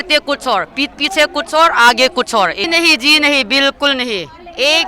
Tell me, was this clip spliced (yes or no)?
yes